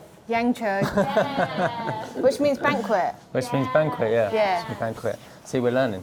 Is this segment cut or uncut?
uncut